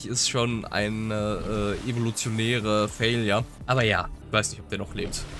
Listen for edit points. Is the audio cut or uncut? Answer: cut